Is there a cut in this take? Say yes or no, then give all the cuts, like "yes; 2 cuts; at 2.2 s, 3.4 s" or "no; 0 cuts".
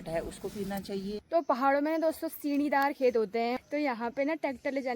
yes; 2 cuts; at 1.2 s, 3.6 s